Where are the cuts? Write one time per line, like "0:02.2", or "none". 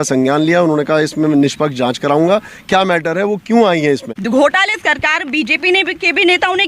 0:04.1